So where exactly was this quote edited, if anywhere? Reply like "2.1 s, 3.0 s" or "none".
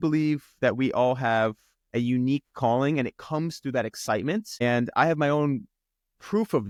none